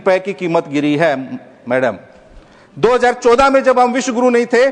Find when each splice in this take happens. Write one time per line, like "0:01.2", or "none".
none